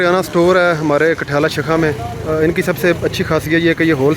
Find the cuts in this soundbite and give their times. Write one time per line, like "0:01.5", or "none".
none